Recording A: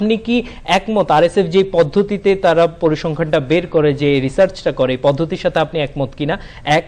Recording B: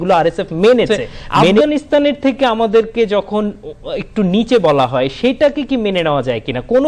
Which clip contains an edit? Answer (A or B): B